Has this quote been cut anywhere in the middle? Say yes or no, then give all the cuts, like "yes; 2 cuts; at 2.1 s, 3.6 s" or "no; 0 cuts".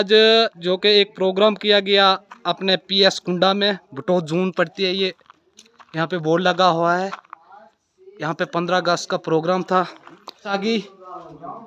yes; 1 cut; at 10.5 s